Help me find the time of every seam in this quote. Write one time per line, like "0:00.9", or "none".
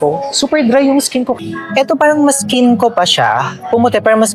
0:01.4